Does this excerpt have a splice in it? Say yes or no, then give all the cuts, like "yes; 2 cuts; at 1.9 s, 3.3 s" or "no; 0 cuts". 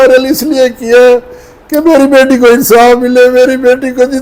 no; 0 cuts